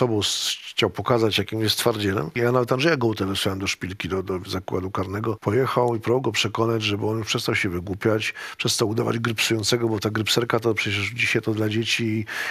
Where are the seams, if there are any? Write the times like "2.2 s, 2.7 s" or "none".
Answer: 2.3 s, 5.4 s